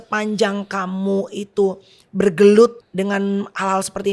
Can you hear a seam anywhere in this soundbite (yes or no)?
yes